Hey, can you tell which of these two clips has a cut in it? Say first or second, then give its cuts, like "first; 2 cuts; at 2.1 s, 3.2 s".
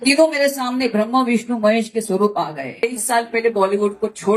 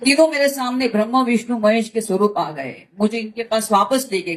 first; 1 cut; at 2.8 s